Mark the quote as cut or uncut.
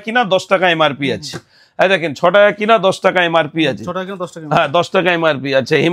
uncut